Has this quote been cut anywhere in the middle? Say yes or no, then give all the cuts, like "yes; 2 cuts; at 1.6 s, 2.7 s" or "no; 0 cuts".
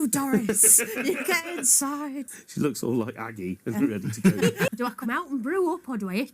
yes; 2 cuts; at 2.2 s, 4.7 s